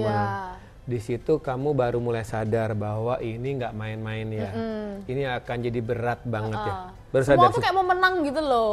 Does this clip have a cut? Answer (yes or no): no